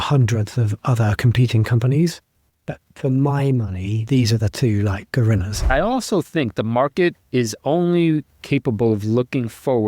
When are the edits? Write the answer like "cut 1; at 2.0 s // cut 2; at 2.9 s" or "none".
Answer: cut 1; at 5.7 s